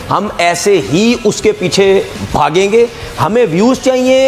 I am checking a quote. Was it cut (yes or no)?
no